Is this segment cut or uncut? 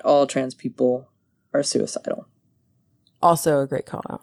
uncut